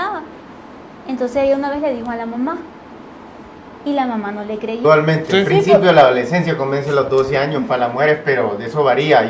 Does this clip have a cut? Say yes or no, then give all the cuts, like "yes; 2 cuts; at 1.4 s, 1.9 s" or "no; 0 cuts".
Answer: no; 0 cuts